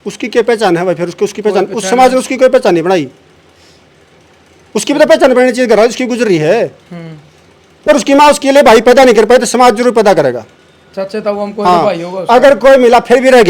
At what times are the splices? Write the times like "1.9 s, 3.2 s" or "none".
7.9 s